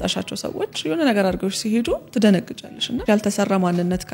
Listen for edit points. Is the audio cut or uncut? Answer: cut